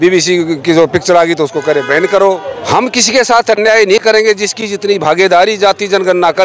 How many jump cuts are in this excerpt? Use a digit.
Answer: 1